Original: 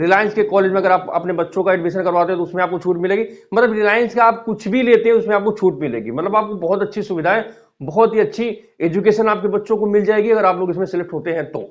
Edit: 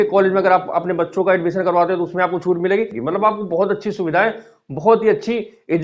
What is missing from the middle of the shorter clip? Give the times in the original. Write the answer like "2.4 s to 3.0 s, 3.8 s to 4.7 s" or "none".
3.4 s to 6.1 s